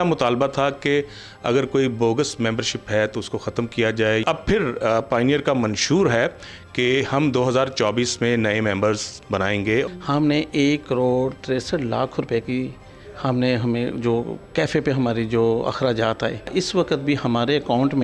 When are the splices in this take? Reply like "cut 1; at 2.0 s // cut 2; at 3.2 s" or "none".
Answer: cut 1; at 4.2 s // cut 2; at 9.9 s // cut 3; at 16.5 s